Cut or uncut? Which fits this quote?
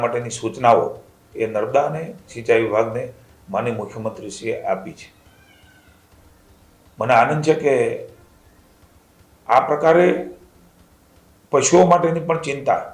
uncut